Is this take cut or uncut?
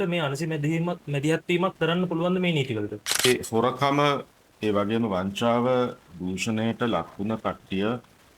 cut